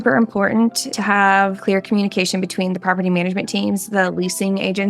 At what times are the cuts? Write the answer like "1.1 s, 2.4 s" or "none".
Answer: 1.6 s